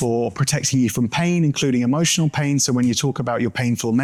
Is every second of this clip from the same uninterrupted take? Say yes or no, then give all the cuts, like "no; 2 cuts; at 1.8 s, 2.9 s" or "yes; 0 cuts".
yes; 0 cuts